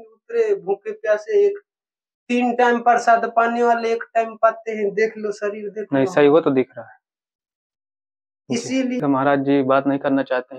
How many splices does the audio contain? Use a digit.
1